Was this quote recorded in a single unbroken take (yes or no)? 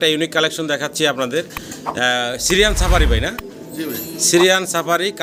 yes